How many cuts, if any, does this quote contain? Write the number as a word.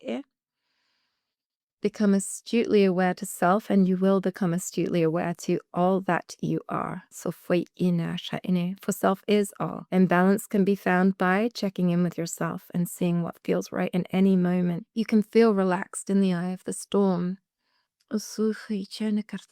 two